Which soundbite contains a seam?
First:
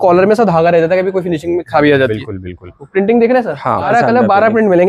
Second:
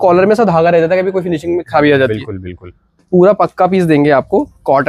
first; 2 cuts; at 2.8 s, 3.9 s

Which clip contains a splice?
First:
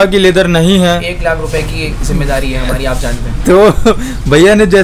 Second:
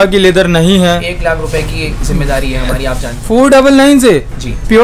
second; 1 cut; at 3.1 s

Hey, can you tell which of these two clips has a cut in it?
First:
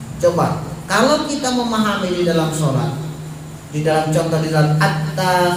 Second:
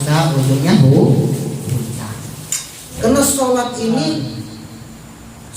second; 1 cut; at 2.9 s

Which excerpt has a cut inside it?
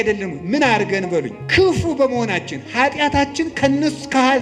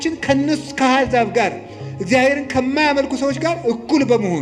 first; 1 cut; at 1.4 s

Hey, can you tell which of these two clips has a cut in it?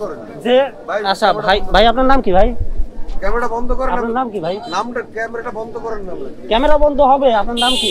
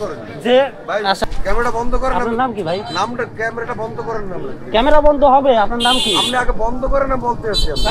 second; 1 cut; at 1.2 s

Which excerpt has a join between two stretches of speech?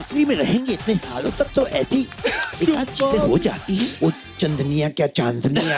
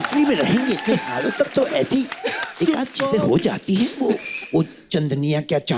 first; 1 cut; at 3.9 s

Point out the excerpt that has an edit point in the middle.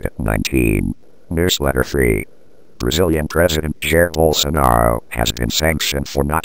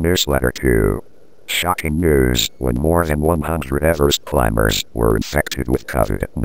first; 1 cut; at 1.2 s

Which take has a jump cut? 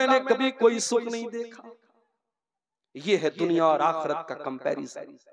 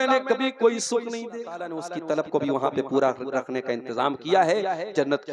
second; 1 cut; at 1.9 s

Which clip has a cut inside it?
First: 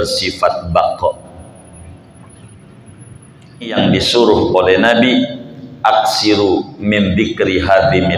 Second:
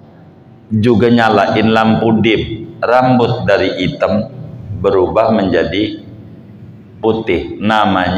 first; 1 cut; at 3.7 s

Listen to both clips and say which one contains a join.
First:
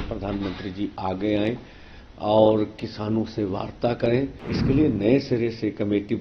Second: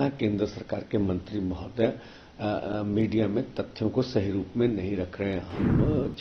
first; 1 cut; at 4.5 s

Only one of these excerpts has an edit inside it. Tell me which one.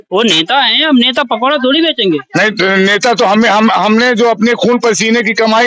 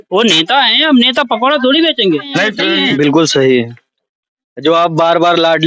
second; 1 cut; at 2.6 s

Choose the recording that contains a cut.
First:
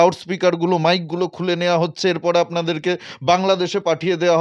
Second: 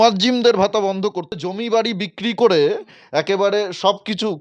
second; 1 cut; at 1.4 s

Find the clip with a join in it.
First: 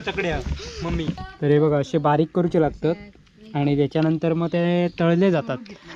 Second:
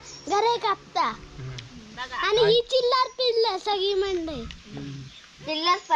first; 1 cut; at 1.2 s

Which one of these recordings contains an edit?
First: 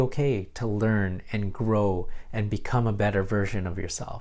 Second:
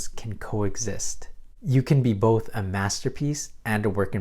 second; 1 cut; at 1.6 s

